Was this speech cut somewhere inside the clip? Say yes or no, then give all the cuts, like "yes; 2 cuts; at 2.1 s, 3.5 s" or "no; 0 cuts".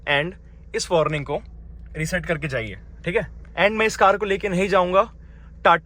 yes; 1 cut; at 3.4 s